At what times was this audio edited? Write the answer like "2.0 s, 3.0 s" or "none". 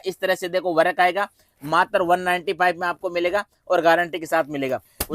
none